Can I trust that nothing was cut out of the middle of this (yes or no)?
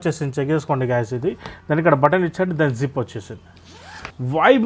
yes